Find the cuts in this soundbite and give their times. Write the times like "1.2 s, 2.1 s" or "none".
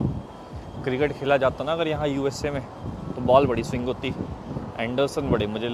none